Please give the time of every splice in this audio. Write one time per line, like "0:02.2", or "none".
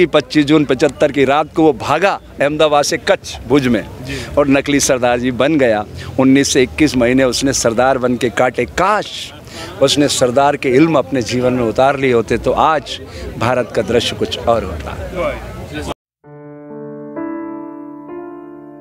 0:15.9